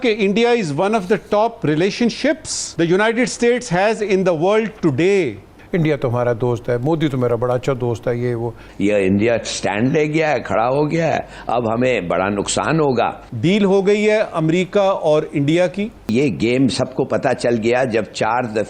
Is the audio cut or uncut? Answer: cut